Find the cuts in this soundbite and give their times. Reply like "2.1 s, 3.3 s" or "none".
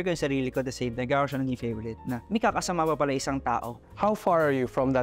none